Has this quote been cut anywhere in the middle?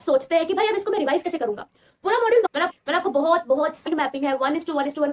yes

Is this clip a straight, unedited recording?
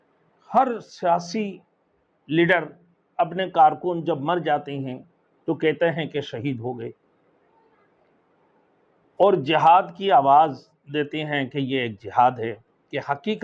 yes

